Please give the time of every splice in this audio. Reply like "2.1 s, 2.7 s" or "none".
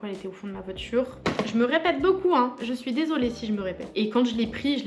1.2 s, 3.8 s